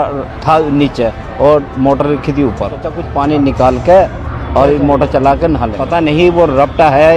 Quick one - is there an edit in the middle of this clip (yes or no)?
yes